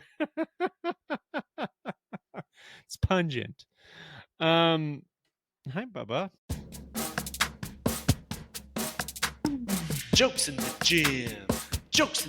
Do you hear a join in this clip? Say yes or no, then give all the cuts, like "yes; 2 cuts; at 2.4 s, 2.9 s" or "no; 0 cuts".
yes; 1 cut; at 6.4 s